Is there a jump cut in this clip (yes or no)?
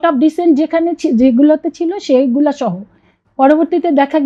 no